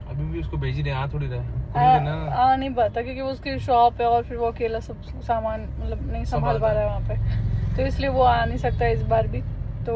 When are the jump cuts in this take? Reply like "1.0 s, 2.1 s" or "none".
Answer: none